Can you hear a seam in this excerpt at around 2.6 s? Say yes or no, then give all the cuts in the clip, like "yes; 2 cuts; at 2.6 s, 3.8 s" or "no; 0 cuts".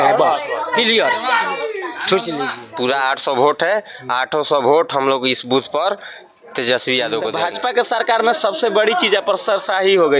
yes; 2 cuts; at 2.6 s, 7.2 s